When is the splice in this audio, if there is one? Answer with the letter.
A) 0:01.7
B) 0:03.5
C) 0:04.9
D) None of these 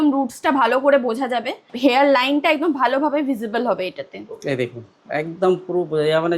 A